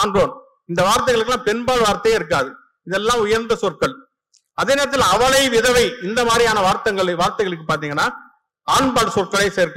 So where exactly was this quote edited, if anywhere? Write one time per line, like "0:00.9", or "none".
none